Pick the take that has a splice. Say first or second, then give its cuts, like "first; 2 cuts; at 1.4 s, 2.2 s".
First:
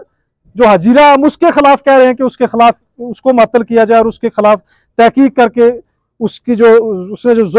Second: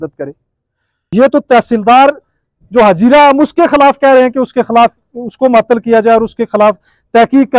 second; 1 cut; at 0.9 s